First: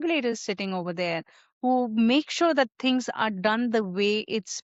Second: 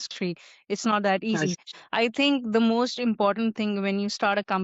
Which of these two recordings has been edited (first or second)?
second